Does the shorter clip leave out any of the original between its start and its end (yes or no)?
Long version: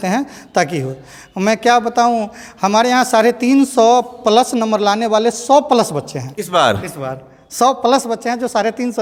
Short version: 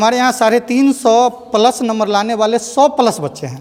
no